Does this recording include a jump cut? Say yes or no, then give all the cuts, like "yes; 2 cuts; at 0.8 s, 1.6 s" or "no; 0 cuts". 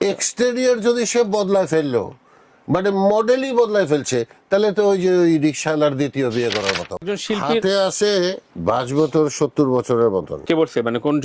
yes; 3 cuts; at 7.0 s, 8.5 s, 10.3 s